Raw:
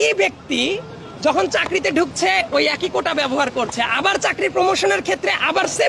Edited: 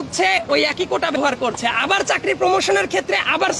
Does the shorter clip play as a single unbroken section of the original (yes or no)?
no